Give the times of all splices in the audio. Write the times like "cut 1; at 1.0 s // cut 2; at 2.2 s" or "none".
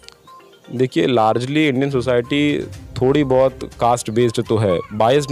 none

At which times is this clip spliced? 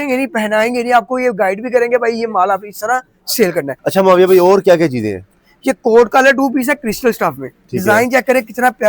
cut 1; at 3.8 s

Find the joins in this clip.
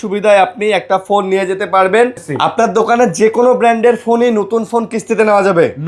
cut 1; at 2.2 s

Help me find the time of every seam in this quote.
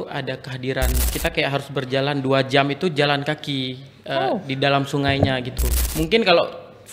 cut 1; at 1.1 s // cut 2; at 5.7 s

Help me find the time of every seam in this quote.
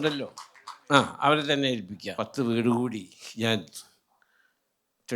cut 1; at 2.0 s

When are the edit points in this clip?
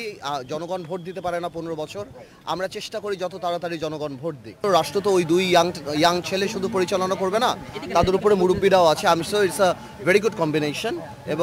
cut 1; at 4.6 s

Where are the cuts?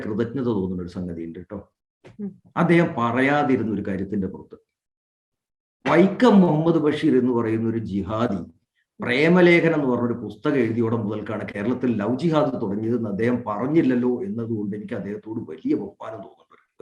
none

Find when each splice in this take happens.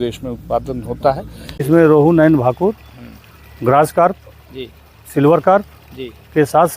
cut 1; at 1.6 s

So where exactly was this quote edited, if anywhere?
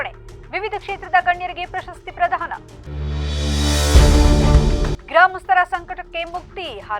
none

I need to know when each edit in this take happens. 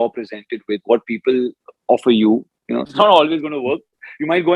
cut 1; at 2.9 s

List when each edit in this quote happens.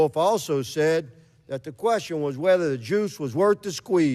none

